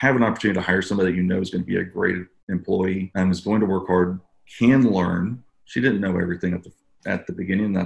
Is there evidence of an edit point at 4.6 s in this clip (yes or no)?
no